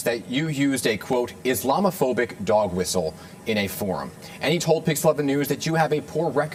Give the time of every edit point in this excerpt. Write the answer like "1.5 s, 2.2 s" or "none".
none